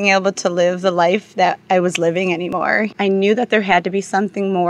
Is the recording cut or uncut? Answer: cut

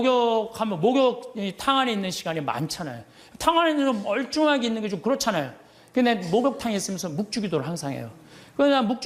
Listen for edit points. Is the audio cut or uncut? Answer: uncut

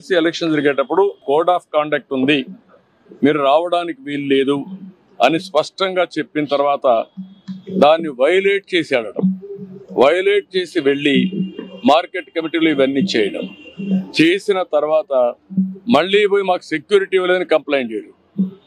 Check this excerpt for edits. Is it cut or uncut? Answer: cut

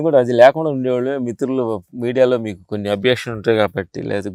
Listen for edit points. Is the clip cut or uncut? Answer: uncut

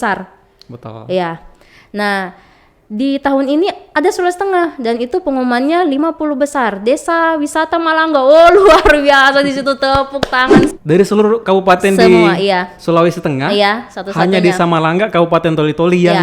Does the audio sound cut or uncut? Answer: cut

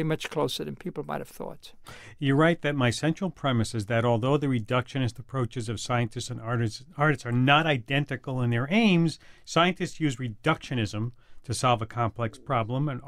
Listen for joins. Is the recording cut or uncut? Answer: uncut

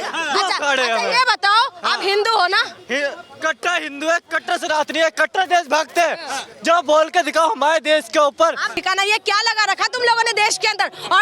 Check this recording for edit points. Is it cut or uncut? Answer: cut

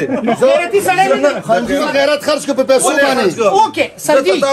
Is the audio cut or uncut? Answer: cut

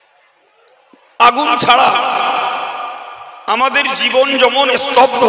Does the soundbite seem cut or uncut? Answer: uncut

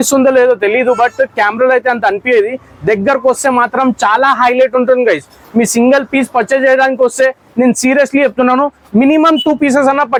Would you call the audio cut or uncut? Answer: uncut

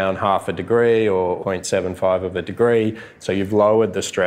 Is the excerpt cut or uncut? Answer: cut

